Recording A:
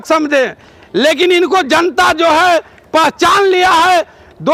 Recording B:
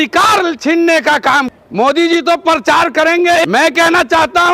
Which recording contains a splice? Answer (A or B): B